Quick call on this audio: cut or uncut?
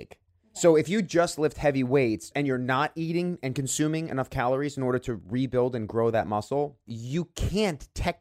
cut